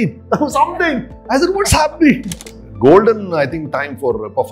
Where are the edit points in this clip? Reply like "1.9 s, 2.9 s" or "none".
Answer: 2.3 s